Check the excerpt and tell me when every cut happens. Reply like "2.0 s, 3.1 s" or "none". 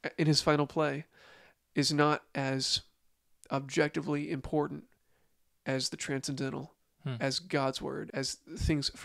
8.1 s